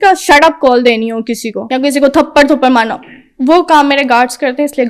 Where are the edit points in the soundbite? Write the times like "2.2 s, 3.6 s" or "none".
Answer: 1.5 s